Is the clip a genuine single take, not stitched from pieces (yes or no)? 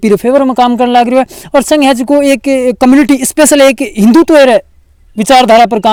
yes